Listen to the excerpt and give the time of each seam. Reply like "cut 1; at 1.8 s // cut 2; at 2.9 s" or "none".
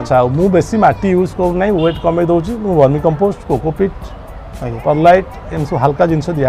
none